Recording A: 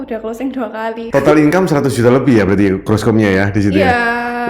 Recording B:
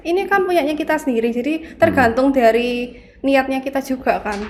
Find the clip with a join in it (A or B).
A